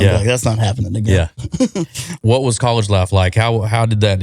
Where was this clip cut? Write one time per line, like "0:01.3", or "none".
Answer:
0:02.2